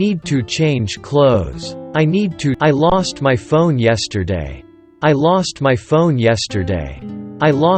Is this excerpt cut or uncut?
uncut